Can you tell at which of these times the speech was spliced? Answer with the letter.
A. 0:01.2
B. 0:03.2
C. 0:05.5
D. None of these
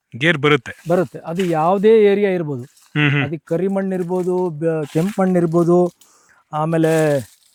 D